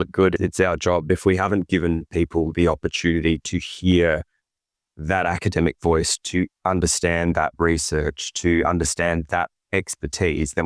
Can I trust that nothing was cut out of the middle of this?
no; 1 cut; at 1.1 s

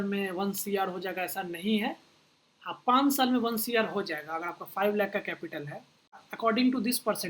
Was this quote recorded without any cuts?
no; 1 cut; at 6.3 s

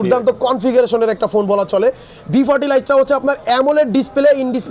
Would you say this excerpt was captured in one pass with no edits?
yes; 0 cuts

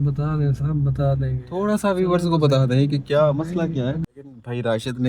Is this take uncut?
no; 1 cut; at 4.0 s

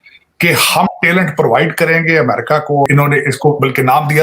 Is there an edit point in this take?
yes; 1 cut; at 2.9 s

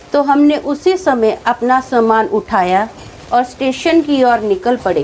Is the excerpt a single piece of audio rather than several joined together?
yes; 0 cuts

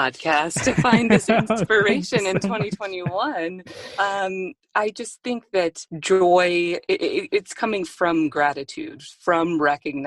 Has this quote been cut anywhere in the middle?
yes; 2 cuts; at 4.6 s, 5.9 s

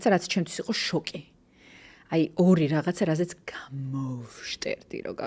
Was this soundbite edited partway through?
no; 0 cuts

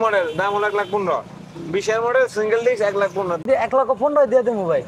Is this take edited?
yes; 1 cut; at 3.4 s

